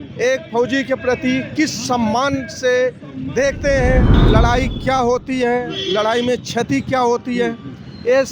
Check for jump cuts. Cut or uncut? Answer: cut